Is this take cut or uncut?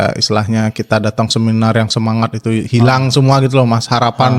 uncut